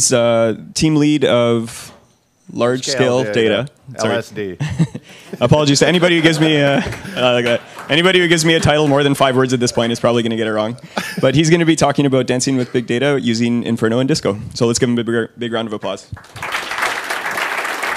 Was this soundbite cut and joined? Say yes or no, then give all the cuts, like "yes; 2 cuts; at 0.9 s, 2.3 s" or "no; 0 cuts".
yes; 1 cut; at 13.6 s